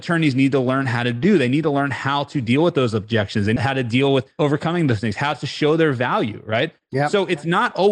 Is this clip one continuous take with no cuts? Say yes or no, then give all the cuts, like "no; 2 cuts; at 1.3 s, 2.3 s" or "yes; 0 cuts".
no; 1 cut; at 4.3 s